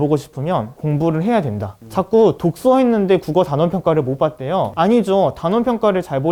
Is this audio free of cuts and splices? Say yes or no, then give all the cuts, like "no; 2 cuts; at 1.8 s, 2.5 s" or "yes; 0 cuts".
yes; 0 cuts